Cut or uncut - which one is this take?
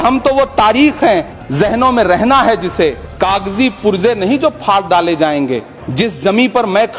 cut